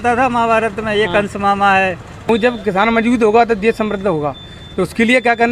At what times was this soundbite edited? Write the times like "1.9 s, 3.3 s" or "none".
2.3 s